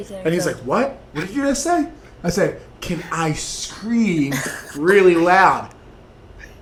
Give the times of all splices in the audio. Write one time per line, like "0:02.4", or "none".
none